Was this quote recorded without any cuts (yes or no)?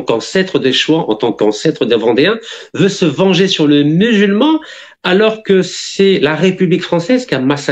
yes